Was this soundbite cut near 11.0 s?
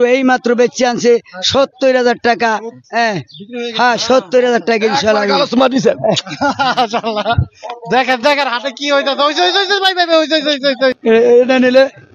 yes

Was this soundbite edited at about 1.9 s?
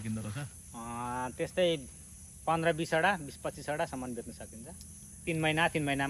no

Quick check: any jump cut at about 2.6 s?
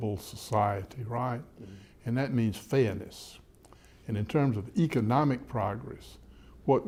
no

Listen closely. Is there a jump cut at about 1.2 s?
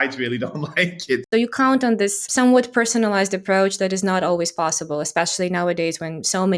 yes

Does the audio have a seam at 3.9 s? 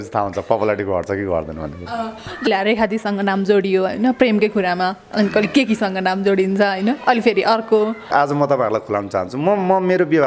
no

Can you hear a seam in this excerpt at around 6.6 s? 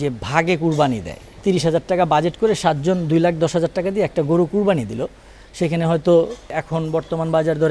yes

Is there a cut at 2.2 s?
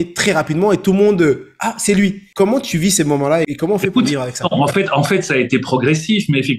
yes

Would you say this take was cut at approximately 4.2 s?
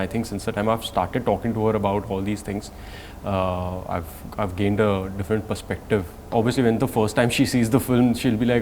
no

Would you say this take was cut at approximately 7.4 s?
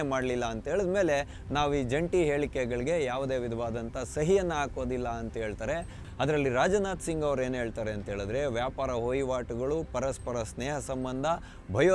no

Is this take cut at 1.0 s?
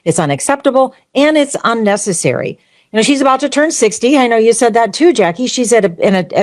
no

